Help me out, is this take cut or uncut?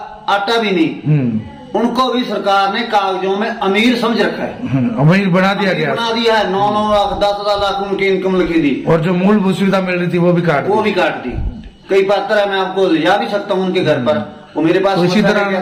uncut